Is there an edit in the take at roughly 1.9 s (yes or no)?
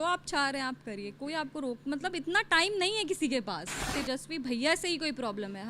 no